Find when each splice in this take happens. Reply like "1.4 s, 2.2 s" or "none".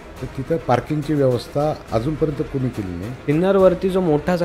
1.8 s, 3.1 s